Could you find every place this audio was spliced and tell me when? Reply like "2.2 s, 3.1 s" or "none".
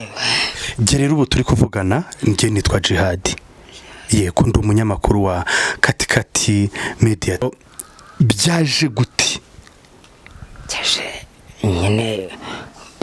7.4 s

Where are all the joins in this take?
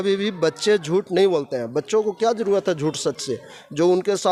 none

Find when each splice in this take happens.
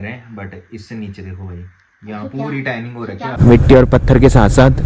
3.4 s

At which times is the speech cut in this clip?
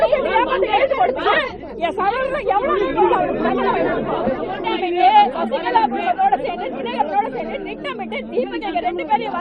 4.4 s

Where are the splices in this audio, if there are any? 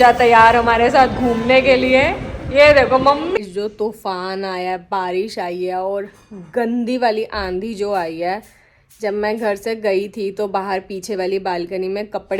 3.4 s

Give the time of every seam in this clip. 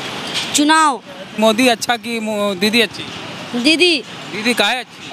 1.2 s

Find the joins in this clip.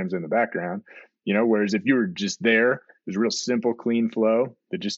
none

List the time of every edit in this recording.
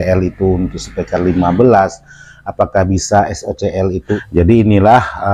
4.2 s

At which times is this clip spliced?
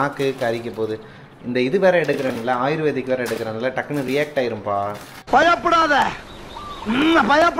none

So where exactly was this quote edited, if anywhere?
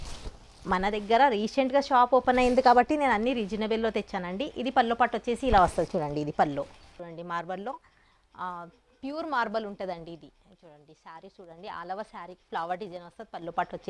7.0 s

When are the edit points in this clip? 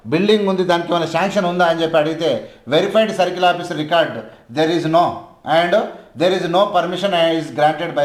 none

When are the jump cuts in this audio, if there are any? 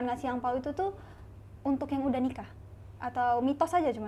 none

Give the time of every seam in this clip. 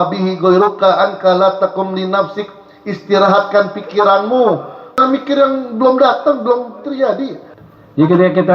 5.0 s, 7.5 s

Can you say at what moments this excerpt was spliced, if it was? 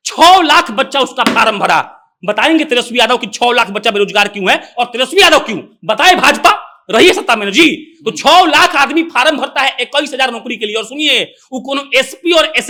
none

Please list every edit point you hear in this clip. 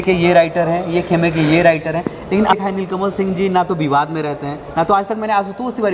2.5 s

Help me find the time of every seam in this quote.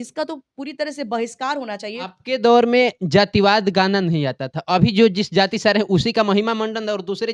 2.0 s

